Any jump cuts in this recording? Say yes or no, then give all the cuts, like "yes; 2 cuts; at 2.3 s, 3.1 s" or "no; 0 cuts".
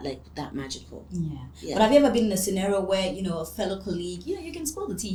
no; 0 cuts